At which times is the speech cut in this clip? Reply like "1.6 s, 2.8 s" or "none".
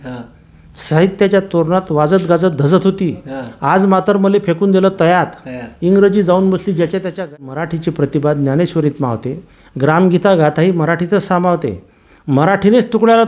7.2 s

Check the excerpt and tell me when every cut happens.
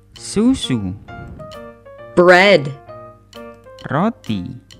none

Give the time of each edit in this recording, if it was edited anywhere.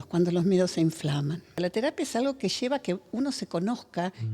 1.6 s

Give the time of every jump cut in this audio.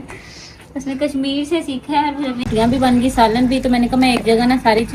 2.5 s

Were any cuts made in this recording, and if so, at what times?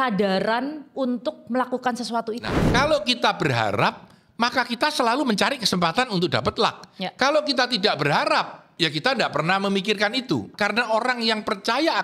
2.5 s, 10.5 s

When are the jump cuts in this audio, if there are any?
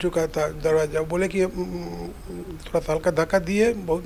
none

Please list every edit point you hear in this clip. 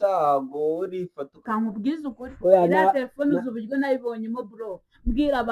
1.4 s

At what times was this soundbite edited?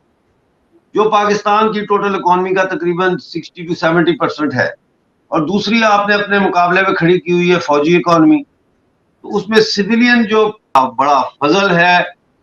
10.8 s

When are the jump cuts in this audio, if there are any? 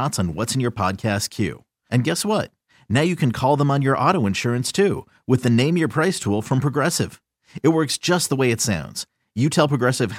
none

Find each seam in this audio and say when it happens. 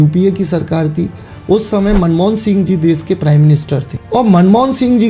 3.9 s

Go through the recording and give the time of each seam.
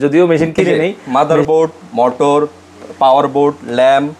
1.0 s

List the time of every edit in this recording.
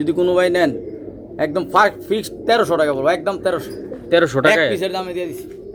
none

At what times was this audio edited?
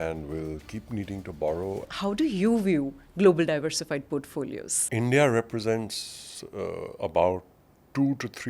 1.9 s, 4.7 s

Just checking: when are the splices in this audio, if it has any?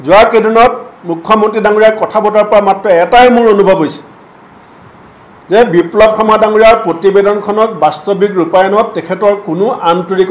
none

